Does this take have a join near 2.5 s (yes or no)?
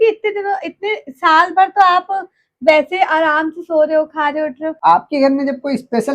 no